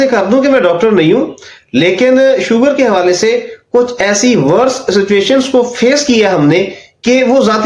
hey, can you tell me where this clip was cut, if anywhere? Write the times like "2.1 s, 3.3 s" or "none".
none